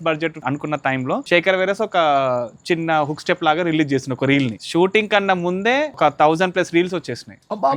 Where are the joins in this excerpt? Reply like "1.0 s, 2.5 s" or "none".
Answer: 0.9 s, 4.6 s, 5.9 s